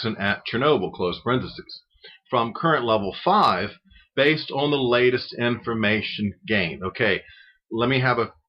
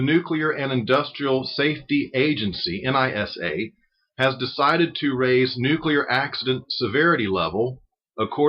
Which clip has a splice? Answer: second; 1 cut; at 3.1 s

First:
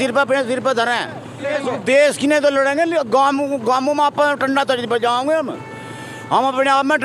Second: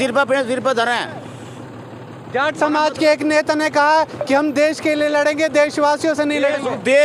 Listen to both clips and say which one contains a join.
first; 1 cut; at 1.5 s

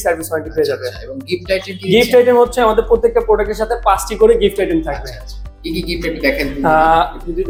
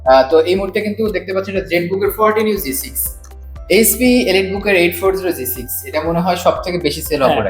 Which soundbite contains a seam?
second; 1 cut; at 3.4 s

